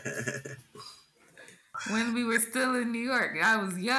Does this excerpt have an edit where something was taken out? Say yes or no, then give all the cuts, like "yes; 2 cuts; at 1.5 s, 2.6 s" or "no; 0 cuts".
yes; 1 cut; at 1.7 s